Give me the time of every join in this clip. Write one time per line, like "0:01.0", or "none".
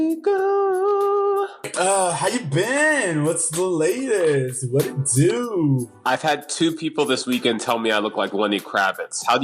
0:01.7